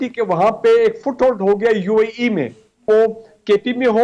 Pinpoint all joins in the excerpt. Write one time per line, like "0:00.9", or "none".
0:02.8